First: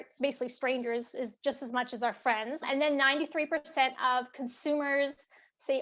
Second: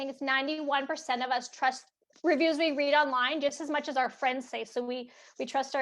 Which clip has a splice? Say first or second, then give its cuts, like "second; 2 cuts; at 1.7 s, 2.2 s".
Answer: second; 1 cut; at 1.9 s